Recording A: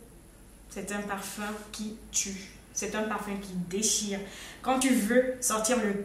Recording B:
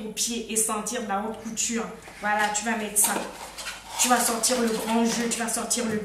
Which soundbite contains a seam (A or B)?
A